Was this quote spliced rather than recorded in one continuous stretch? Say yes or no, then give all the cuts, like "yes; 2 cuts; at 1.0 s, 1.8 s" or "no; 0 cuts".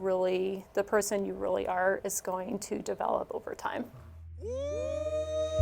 yes; 1 cut; at 4.5 s